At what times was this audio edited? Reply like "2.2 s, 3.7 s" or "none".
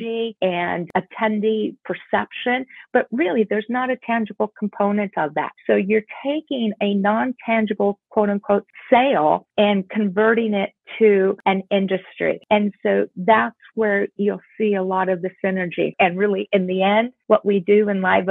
15.9 s